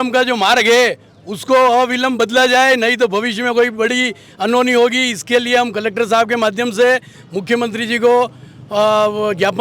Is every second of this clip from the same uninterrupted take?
yes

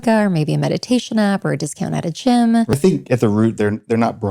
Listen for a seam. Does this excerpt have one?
yes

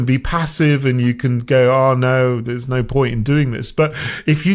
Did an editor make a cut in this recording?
no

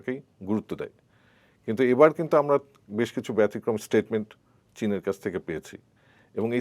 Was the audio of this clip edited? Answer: no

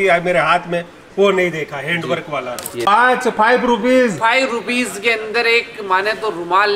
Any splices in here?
yes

